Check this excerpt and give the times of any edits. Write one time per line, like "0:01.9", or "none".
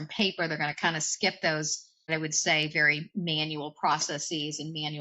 0:02.1